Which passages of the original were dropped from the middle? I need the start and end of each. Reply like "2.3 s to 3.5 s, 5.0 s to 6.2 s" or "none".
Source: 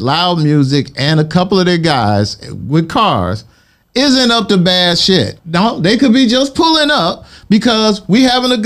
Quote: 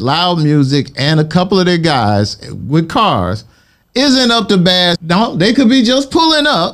5.0 s to 5.4 s